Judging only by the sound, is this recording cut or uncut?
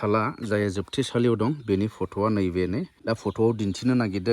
cut